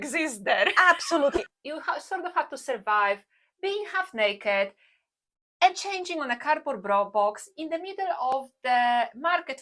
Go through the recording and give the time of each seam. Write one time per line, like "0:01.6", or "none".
0:01.4